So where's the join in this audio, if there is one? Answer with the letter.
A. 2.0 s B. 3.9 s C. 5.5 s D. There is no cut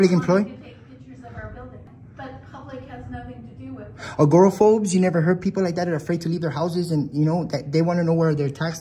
A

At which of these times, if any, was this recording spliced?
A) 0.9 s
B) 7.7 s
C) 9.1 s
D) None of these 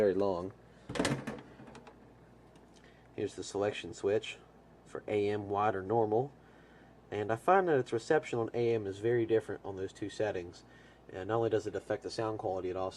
A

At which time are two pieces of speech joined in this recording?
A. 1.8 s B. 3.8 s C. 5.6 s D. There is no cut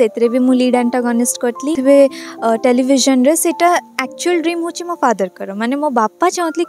A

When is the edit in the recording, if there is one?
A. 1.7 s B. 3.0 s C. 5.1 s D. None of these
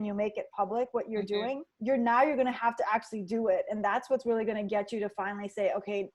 A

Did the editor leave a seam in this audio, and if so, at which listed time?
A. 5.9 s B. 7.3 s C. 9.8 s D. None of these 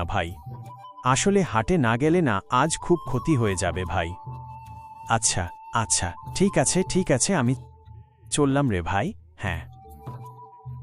C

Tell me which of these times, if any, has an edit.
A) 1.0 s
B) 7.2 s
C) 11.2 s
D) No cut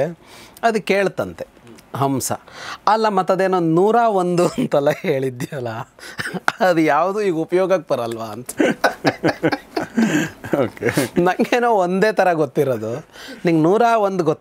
D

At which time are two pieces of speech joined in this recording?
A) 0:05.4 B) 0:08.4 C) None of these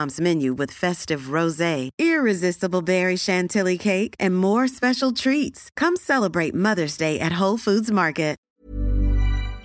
B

